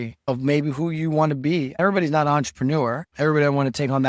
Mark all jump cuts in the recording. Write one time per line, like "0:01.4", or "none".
0:01.8